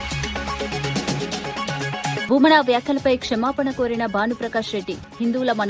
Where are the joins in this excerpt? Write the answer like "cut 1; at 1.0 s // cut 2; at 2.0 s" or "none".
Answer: cut 1; at 0.7 s // cut 2; at 2.2 s